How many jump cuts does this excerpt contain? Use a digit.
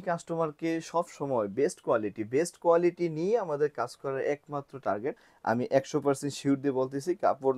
1